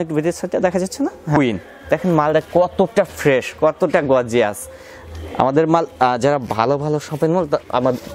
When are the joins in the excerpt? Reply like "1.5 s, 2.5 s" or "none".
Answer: 1.4 s